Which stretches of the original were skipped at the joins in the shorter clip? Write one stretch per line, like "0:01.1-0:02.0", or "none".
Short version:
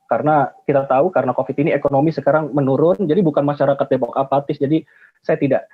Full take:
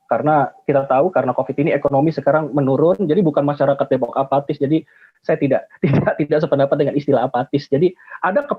none